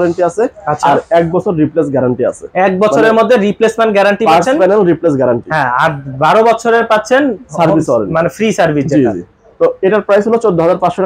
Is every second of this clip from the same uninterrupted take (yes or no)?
yes